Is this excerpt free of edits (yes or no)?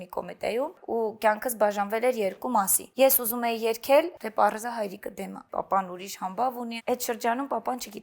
no